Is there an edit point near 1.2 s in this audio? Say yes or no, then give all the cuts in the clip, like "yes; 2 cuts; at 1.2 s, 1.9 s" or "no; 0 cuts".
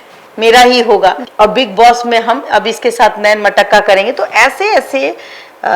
no; 0 cuts